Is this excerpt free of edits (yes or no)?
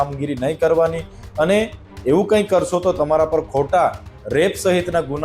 yes